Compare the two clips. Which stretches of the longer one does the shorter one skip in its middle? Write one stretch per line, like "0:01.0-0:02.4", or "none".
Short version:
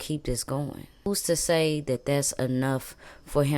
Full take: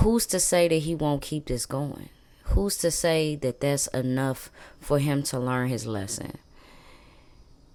0:02.3-0:02.6